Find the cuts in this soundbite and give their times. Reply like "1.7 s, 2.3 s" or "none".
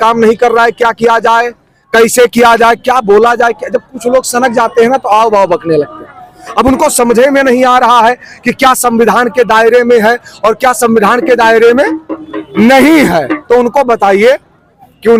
none